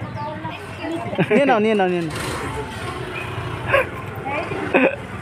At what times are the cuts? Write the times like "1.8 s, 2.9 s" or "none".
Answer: 1.4 s